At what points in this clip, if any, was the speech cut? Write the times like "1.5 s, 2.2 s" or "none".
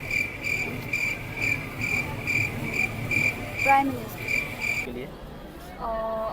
4.8 s